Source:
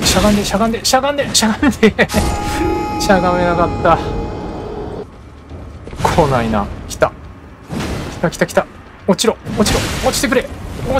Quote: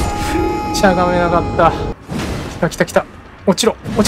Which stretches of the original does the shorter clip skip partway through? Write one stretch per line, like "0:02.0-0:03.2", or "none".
0:04.2-0:07.5